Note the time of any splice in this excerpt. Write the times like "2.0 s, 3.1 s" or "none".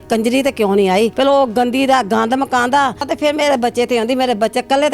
1.1 s, 3.1 s